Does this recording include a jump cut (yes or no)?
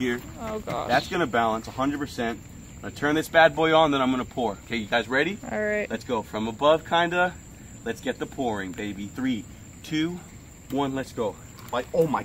no